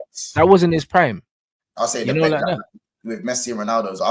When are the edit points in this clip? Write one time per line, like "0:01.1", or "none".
none